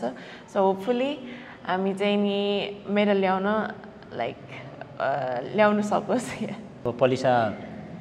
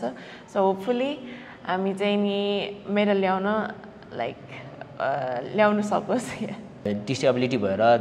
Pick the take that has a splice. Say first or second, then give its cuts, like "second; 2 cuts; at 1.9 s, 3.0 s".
second; 1 cut; at 6.8 s